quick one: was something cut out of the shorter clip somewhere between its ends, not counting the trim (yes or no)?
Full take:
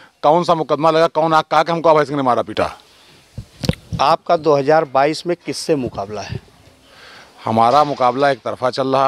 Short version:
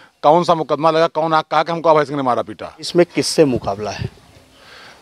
yes